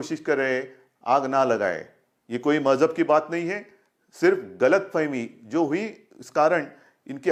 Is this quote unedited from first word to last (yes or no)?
yes